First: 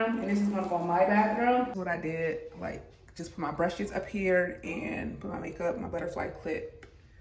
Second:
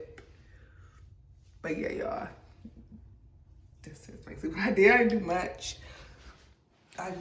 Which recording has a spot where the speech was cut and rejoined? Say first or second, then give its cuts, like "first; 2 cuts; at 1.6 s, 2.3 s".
first; 1 cut; at 1.7 s